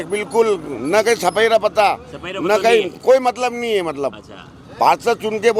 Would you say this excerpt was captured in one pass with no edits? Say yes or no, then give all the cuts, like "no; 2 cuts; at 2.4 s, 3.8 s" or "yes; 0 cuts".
yes; 0 cuts